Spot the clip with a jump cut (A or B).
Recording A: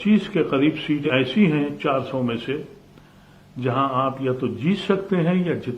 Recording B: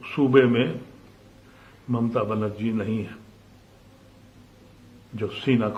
A